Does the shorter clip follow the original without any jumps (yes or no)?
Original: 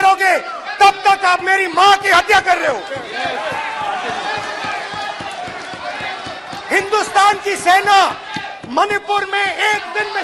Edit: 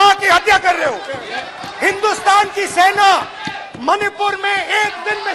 no